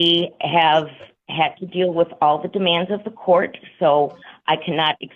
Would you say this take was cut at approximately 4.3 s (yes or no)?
no